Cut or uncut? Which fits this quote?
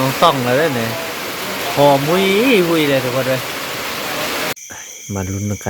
cut